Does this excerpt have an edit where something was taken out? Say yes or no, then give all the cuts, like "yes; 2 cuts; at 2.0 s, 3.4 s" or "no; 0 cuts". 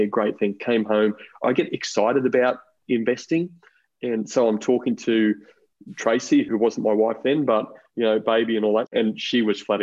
yes; 2 cuts; at 1.4 s, 8.9 s